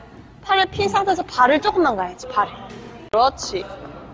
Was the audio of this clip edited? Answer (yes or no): yes